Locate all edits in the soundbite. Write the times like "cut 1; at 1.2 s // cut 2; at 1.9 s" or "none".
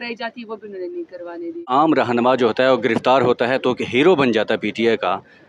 cut 1; at 1.6 s